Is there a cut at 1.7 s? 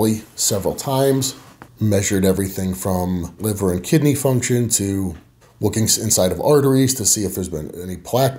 no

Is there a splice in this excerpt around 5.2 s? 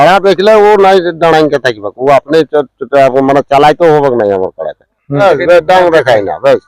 yes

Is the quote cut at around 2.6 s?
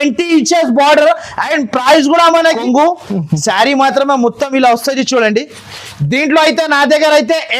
yes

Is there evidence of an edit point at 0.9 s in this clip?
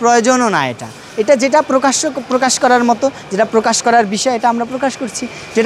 no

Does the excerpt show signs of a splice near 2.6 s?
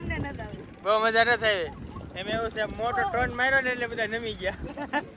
no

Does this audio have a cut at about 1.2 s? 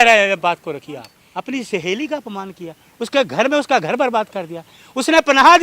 yes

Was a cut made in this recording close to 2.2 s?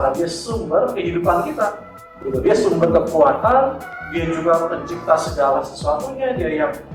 no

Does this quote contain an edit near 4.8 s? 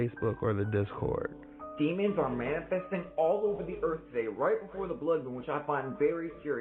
no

